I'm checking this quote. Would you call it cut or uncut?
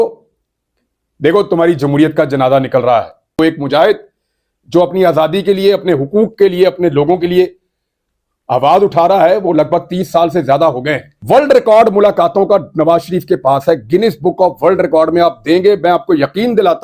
cut